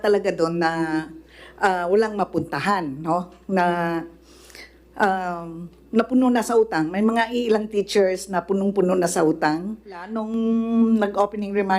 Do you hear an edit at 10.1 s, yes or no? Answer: yes